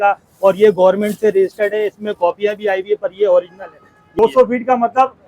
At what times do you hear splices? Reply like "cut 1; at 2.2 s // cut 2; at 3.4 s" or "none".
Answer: cut 1; at 4.1 s